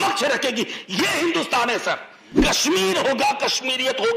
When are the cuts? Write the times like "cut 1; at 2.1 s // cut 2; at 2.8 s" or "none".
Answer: cut 1; at 2.4 s